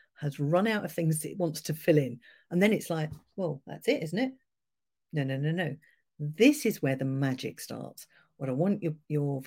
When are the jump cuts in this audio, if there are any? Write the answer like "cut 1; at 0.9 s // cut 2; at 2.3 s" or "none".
none